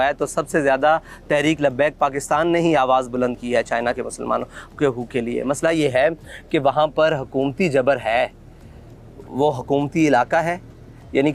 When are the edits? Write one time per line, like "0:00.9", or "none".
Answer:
none